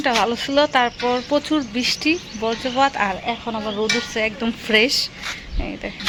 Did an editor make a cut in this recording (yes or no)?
no